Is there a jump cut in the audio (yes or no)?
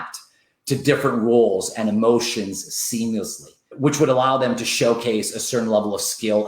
yes